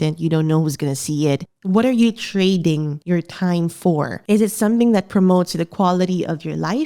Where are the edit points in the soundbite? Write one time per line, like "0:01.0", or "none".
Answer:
0:01.5
0:02.9